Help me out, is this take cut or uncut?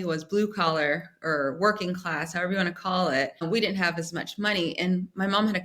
cut